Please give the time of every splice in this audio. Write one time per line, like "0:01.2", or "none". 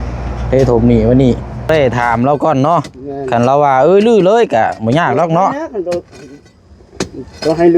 0:01.7